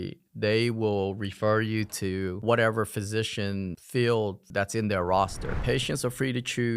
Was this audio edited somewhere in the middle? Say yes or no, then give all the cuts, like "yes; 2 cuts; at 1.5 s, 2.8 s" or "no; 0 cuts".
yes; 2 cuts; at 4.4 s, 5.6 s